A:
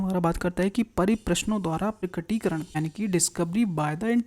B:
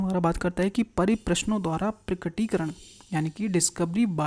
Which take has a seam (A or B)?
A